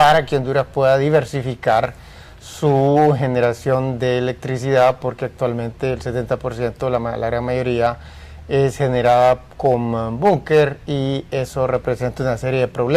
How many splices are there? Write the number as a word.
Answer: one